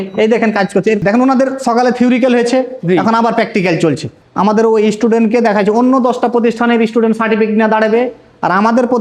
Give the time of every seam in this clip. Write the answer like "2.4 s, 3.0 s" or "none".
1.0 s, 4.2 s

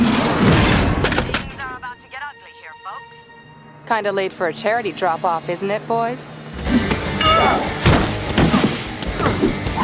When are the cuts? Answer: none

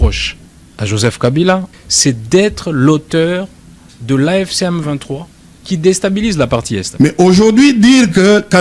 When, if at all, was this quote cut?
6.9 s

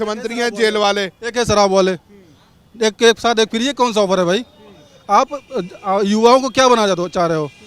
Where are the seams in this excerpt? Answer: none

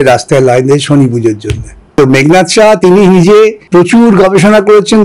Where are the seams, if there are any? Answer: 1.9 s, 3.6 s

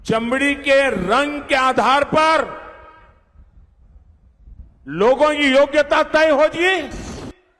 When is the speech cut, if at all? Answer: none

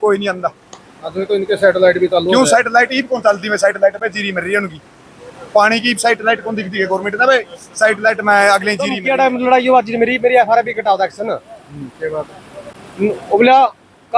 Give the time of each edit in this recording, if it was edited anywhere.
9.0 s

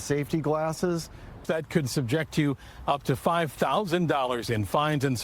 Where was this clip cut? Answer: 1.4 s

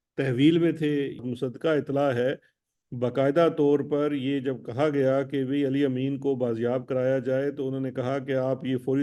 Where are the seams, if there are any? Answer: 1.3 s

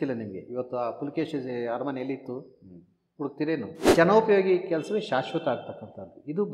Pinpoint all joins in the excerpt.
3.9 s

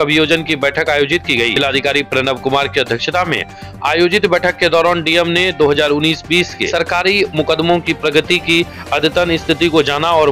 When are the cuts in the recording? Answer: 1.5 s, 6.6 s

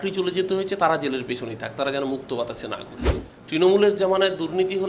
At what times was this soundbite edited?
3.3 s

